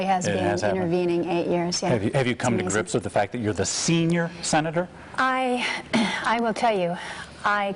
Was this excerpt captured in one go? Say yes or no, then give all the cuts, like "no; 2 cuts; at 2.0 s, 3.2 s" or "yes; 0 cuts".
no; 1 cut; at 4.8 s